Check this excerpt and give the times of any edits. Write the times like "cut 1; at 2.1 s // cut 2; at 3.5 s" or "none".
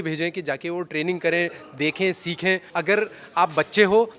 cut 1; at 2.7 s